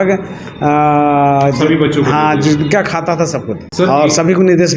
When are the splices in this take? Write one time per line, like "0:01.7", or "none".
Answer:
0:03.6